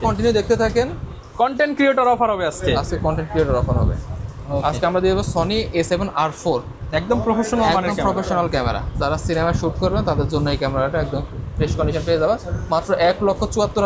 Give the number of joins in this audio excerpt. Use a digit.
0